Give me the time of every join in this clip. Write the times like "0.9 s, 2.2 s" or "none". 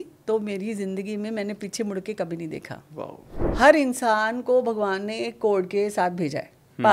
3.4 s

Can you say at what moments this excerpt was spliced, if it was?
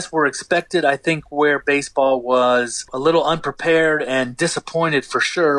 2.9 s

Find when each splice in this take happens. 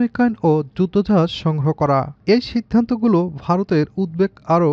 2.1 s

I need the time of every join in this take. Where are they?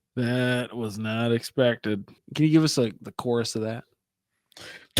2.2 s

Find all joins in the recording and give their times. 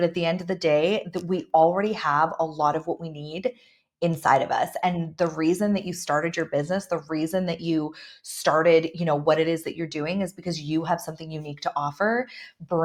none

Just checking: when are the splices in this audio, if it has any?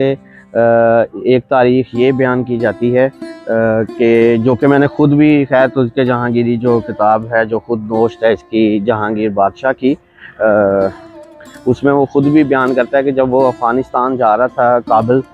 none

